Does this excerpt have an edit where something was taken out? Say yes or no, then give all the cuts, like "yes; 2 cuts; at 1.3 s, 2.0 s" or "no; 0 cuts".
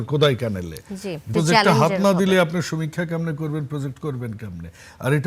yes; 1 cut; at 1.3 s